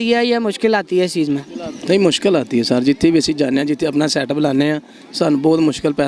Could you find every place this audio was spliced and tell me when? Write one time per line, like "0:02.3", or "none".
none